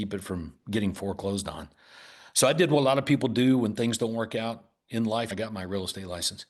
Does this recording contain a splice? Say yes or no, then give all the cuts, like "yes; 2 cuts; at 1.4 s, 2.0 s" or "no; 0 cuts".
yes; 1 cut; at 5.3 s